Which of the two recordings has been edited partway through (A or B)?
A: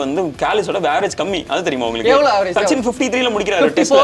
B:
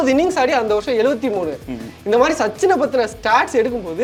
A